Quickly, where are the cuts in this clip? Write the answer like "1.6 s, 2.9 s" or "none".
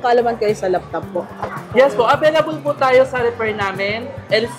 1.3 s